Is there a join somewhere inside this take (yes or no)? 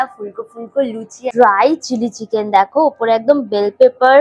yes